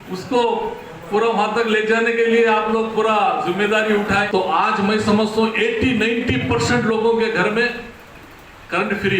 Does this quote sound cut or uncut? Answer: cut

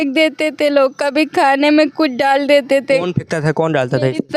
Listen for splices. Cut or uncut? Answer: uncut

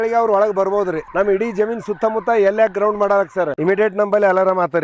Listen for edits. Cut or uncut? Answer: cut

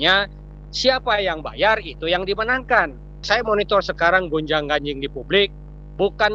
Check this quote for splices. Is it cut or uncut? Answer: cut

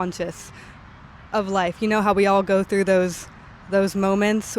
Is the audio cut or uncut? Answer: uncut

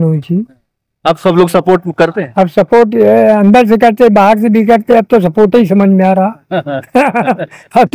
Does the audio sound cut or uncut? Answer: uncut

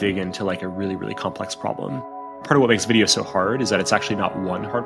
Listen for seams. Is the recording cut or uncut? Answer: cut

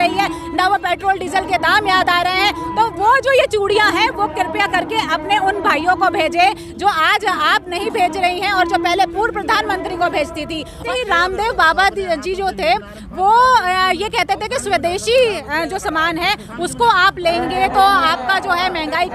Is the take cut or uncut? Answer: cut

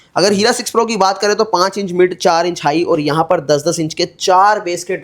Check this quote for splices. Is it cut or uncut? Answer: uncut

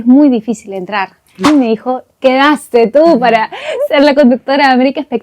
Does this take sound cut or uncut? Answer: cut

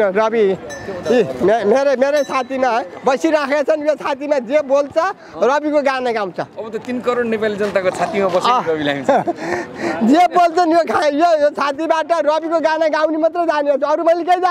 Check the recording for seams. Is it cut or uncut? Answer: uncut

